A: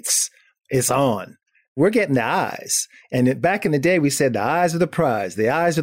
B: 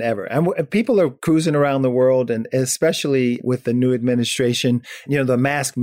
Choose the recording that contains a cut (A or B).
A